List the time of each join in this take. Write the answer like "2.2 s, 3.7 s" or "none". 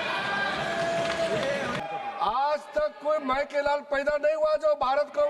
1.8 s